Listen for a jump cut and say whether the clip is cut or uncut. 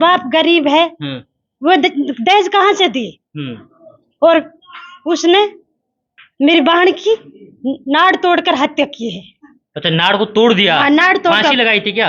uncut